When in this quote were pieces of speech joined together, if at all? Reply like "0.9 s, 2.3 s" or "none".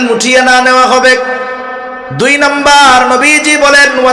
none